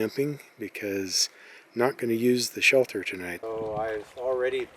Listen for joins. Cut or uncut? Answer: cut